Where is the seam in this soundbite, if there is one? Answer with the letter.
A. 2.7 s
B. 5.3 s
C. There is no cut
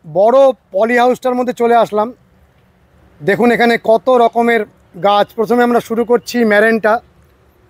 C